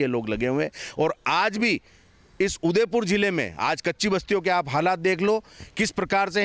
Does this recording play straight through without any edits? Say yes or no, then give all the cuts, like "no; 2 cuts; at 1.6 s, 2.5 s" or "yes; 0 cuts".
yes; 0 cuts